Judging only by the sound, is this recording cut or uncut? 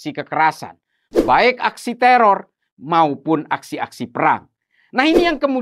uncut